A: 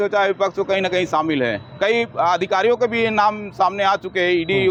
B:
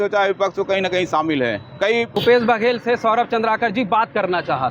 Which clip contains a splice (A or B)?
B